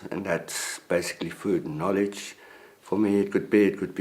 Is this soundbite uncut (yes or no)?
no